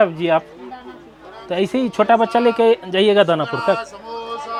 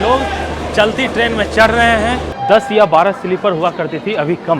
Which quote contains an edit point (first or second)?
second